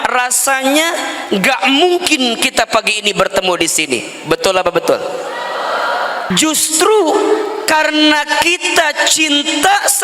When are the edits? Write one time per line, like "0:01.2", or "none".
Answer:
0:06.3